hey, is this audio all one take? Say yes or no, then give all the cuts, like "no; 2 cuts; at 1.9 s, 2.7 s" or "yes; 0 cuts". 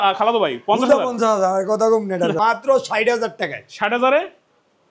no; 1 cut; at 2.4 s